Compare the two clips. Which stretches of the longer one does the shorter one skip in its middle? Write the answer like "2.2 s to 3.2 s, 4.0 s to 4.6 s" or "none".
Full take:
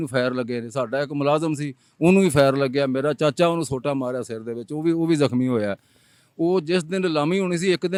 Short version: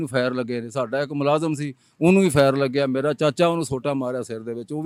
none

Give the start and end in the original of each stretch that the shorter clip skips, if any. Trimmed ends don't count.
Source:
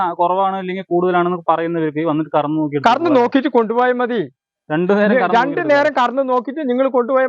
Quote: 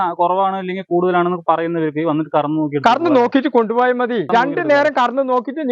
4.3 s to 5.3 s

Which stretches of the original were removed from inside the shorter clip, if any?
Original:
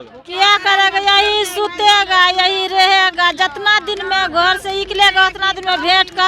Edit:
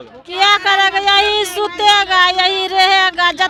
none

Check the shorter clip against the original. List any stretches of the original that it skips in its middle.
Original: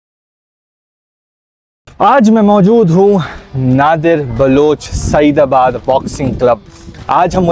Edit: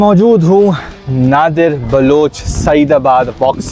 none

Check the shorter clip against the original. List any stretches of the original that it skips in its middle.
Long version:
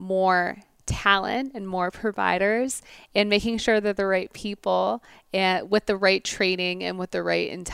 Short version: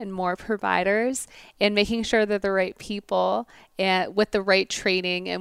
none

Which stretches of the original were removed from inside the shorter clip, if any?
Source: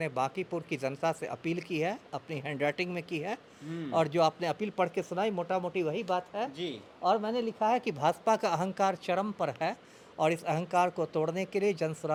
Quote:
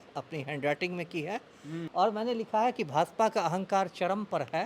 3.8 s to 6.9 s

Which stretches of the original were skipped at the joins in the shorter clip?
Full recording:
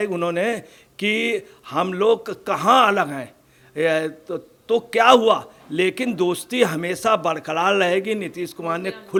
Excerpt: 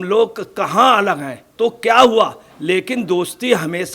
3.3 s to 4.5 s

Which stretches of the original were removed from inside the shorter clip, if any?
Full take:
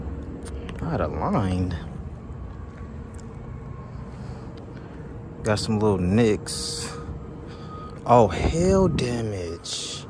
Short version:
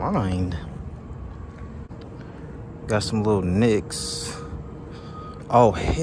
3.1 s to 4.4 s

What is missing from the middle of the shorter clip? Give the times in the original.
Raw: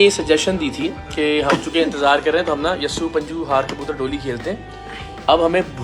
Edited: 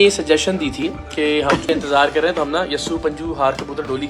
1.7 s to 1.8 s

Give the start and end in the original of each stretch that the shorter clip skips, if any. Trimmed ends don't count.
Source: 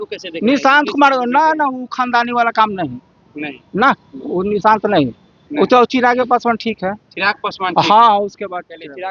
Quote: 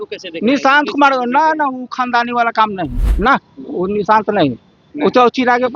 3.0 s to 3.6 s

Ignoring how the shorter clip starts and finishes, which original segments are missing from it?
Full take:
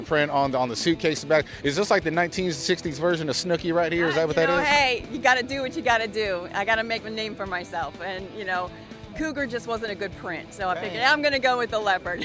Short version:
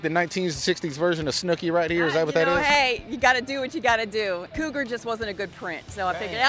6.5 s to 9.1 s

